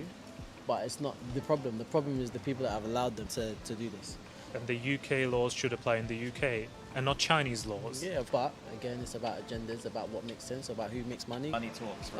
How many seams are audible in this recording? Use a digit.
4